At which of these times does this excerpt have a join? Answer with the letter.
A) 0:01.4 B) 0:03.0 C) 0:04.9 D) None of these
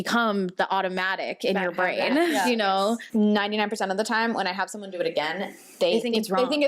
B